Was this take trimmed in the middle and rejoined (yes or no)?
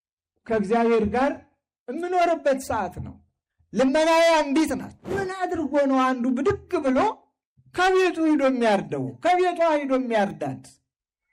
yes